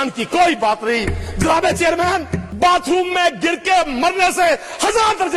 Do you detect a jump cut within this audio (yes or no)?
yes